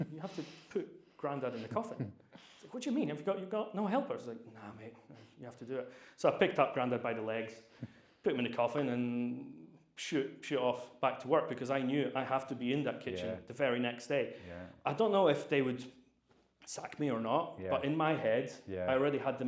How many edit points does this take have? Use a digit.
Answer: 0